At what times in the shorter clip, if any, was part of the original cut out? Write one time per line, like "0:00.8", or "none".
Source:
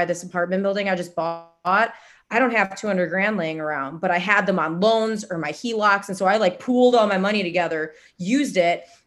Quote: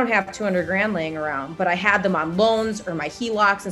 none